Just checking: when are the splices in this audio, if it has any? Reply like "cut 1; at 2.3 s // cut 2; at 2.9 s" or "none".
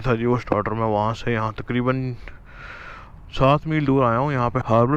none